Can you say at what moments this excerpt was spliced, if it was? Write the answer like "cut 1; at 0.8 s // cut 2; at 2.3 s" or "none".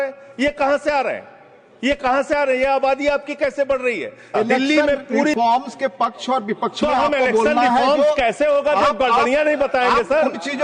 cut 1; at 5.3 s